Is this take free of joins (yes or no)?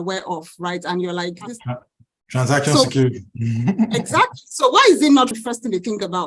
no